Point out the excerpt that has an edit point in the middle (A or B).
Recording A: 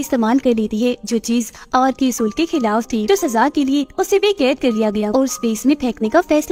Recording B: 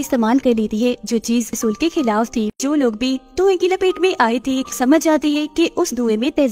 B